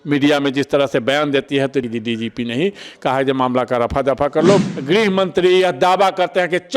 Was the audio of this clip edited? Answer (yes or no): yes